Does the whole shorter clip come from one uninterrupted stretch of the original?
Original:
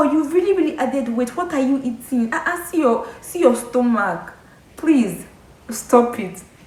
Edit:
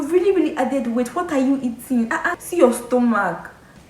no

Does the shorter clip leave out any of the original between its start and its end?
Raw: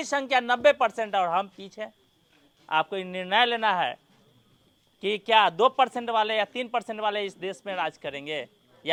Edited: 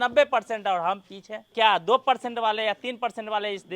yes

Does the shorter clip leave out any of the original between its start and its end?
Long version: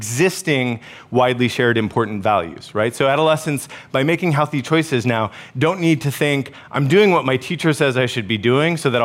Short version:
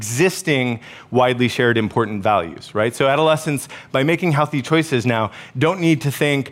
no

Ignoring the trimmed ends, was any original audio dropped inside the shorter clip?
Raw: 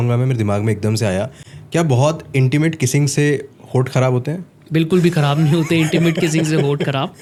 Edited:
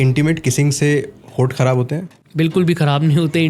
no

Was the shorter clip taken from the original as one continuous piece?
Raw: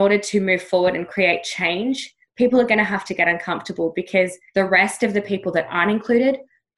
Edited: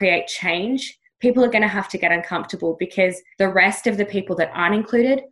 yes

